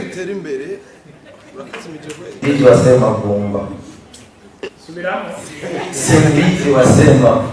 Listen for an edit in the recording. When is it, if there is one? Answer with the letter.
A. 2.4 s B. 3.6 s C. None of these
A